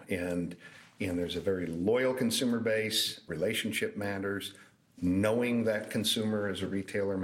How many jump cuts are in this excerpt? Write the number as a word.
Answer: one